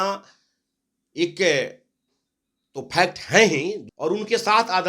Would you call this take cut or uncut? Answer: cut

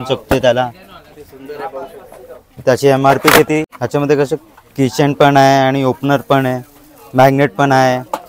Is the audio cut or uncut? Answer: cut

